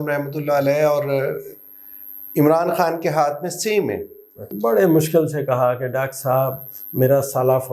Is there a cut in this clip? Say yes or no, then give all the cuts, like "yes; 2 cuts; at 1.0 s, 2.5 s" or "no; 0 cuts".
yes; 1 cut; at 4.5 s